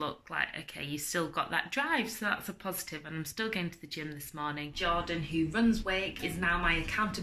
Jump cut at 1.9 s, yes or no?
no